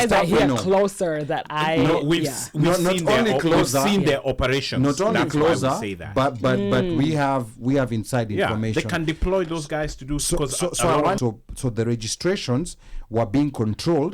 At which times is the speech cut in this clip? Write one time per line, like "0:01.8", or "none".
0:11.2